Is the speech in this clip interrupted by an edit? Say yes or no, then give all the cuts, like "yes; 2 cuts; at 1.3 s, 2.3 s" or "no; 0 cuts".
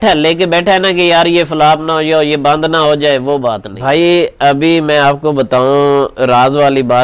yes; 1 cut; at 3.6 s